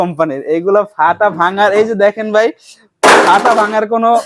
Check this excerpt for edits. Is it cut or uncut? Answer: uncut